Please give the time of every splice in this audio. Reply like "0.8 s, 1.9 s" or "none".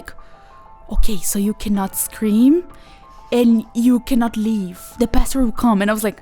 4.8 s